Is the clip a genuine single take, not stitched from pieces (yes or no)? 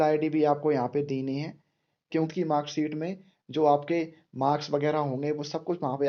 no